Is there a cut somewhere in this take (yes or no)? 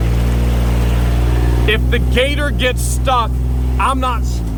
no